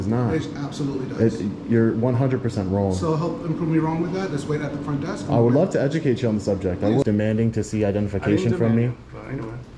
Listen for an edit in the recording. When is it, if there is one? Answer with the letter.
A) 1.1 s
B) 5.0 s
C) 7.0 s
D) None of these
C